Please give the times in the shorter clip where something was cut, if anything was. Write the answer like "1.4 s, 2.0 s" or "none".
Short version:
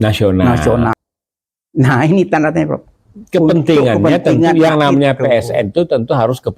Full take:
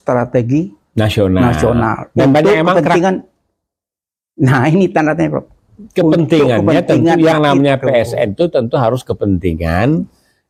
1.0 s